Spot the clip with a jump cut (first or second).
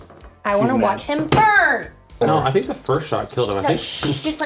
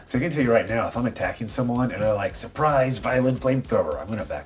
first